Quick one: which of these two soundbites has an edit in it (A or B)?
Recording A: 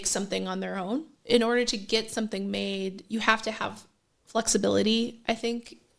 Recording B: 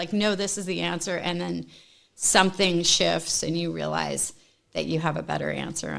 A